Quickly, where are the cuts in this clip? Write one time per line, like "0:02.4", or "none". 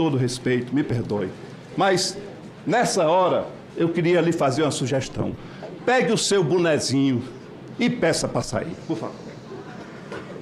none